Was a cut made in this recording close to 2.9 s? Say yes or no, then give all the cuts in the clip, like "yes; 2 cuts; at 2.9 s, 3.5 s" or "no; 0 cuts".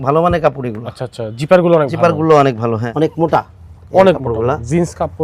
yes; 1 cut; at 2.9 s